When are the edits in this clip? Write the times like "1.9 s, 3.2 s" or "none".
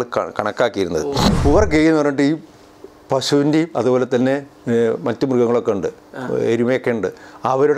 1.3 s